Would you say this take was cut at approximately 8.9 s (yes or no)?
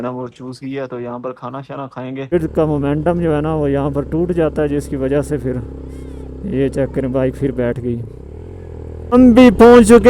yes